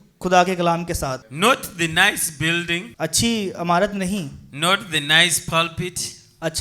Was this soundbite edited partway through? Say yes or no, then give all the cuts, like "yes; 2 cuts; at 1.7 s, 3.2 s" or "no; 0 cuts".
yes; 2 cuts; at 1.2 s, 2.9 s